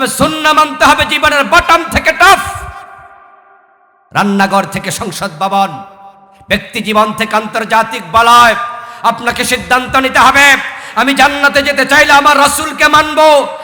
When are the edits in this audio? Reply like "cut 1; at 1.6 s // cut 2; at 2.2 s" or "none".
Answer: none